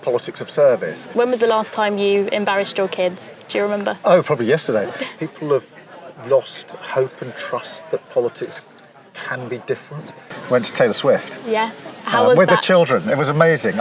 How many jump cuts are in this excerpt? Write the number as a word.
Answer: three